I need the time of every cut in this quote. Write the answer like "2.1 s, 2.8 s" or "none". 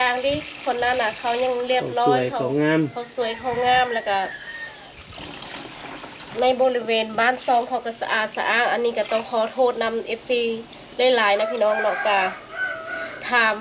none